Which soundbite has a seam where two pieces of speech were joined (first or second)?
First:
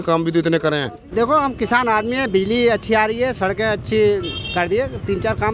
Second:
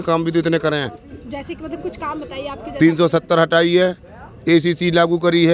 first